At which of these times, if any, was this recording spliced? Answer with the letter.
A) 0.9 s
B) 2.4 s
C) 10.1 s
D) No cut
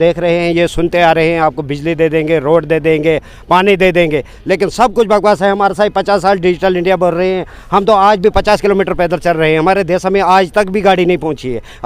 D